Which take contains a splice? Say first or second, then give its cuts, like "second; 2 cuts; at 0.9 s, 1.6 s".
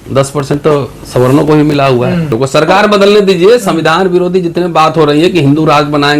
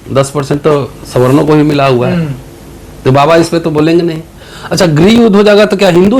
first; 1 cut; at 2.3 s